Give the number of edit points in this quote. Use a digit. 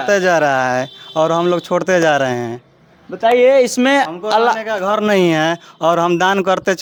0